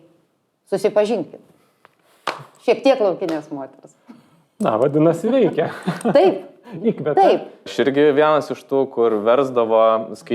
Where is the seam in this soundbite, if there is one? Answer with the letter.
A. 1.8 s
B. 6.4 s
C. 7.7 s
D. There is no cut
C